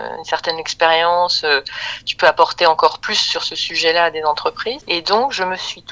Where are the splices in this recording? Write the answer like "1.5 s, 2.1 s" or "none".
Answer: 4.8 s

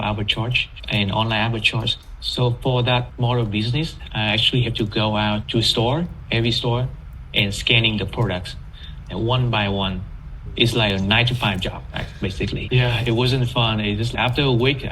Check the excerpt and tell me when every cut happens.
none

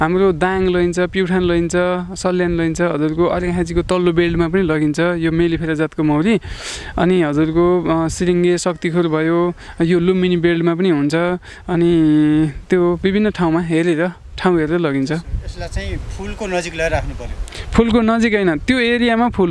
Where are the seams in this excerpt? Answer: none

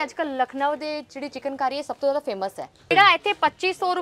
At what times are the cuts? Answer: 2.9 s

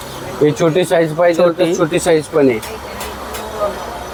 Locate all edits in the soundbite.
none

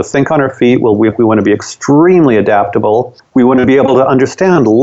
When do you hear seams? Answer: 3.2 s

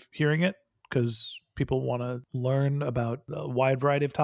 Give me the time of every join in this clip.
2.2 s, 3.3 s

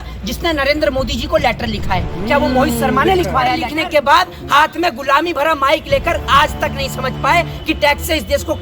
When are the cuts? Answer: 3.7 s

